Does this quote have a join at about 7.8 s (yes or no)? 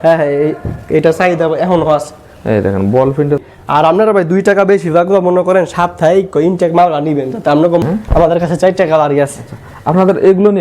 yes